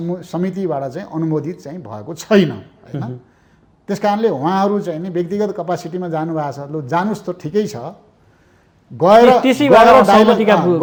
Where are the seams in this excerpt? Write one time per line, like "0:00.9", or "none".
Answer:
none